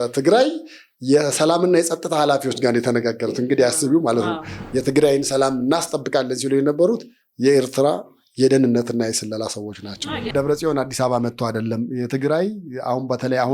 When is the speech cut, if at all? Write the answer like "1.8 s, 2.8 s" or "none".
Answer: 4.5 s, 10.3 s

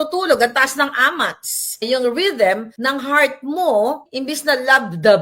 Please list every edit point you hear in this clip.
1.8 s, 2.7 s, 4.0 s

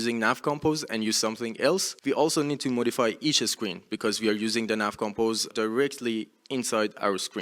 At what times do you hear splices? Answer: 1.9 s, 5.5 s

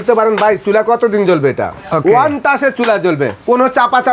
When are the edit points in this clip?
none

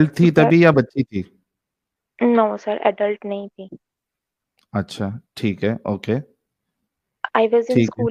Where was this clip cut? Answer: none

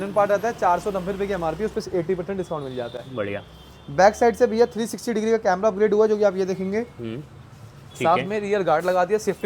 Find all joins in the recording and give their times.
none

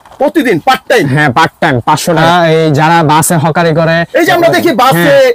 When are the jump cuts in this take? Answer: 2.2 s

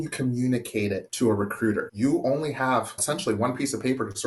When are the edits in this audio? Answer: 1.1 s, 1.9 s, 3.0 s

